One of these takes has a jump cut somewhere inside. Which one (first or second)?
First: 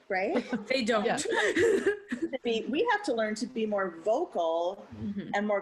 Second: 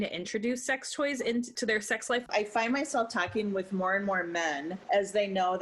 second